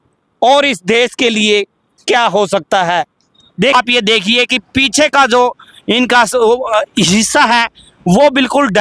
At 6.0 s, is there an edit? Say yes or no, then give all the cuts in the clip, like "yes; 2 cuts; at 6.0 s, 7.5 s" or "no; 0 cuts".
no; 1 cut; at 3.7 s